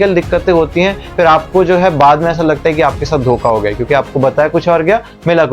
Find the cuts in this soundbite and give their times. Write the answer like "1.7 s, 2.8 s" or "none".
none